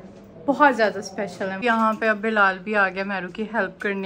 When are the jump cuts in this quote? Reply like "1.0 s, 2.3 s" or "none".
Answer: 1.6 s